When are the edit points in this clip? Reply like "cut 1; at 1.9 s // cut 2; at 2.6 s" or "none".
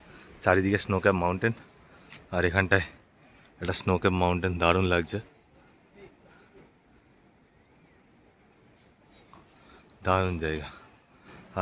none